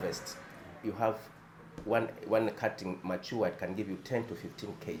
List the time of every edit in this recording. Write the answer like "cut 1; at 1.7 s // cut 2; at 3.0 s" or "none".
none